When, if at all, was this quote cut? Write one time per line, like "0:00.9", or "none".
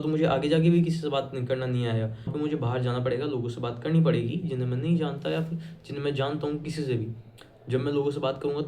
0:02.3